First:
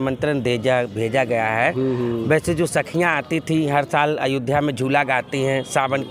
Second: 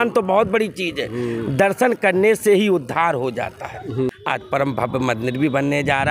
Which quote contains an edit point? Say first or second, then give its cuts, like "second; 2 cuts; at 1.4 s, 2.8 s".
second; 1 cut; at 4.1 s